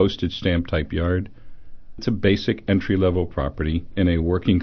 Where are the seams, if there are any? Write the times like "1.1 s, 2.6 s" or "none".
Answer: 2.0 s